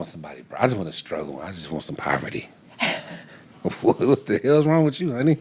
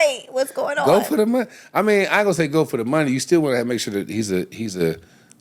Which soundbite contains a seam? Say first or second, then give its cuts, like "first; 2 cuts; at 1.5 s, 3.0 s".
second; 1 cut; at 3.5 s